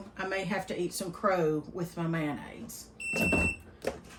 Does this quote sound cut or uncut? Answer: uncut